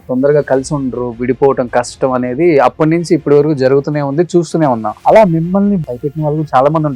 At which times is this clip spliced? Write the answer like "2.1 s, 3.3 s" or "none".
4.9 s, 5.8 s